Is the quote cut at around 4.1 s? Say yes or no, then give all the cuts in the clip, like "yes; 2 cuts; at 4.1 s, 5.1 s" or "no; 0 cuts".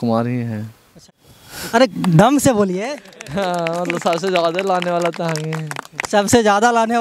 no; 1 cut; at 0.9 s